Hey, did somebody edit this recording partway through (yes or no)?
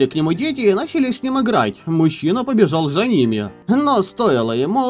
yes